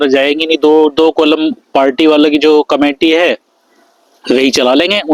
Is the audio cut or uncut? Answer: uncut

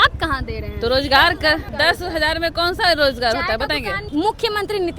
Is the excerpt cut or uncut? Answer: cut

